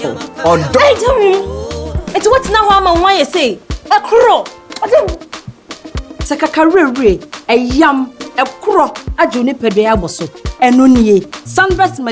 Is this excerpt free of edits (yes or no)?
yes